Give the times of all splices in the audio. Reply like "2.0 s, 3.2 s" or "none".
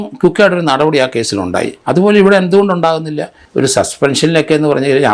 3.4 s